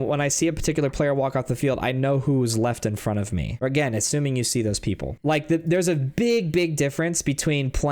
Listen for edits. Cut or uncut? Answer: cut